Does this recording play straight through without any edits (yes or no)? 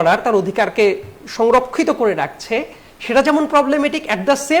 yes